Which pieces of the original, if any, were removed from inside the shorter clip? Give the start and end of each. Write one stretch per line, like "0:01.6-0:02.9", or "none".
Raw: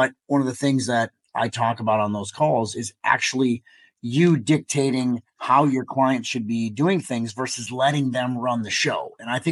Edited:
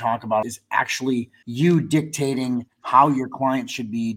0:02.5-0:03.5